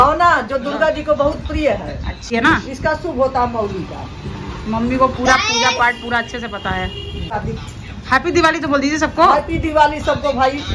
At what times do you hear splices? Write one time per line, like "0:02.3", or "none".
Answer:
0:02.3
0:07.3